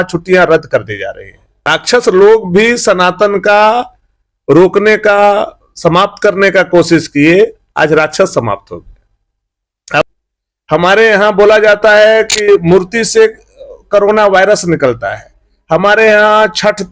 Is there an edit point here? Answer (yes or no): yes